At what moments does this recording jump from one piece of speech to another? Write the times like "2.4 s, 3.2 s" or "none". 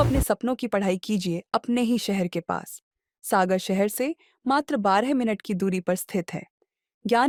none